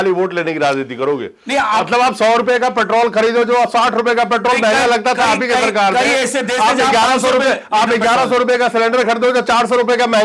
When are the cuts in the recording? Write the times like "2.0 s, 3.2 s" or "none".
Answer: none